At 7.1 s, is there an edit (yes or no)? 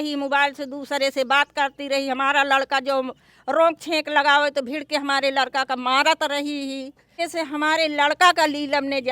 yes